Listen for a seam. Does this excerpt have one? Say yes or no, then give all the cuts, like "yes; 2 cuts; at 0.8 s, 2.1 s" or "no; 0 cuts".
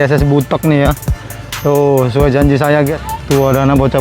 yes; 1 cut; at 3.0 s